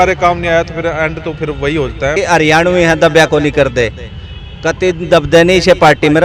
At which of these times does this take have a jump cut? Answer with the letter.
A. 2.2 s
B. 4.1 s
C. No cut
A